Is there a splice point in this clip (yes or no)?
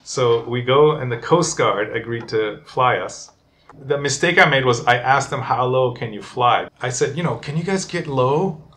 yes